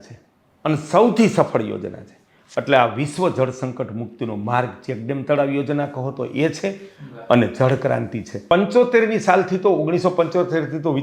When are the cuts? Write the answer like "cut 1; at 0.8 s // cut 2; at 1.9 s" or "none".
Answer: cut 1; at 8.5 s